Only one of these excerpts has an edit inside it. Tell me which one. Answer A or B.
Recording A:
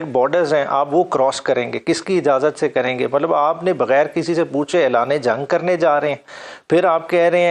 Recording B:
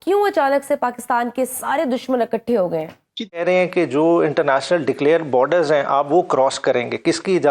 B